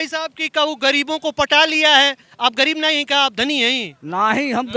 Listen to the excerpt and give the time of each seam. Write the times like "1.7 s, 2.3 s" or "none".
none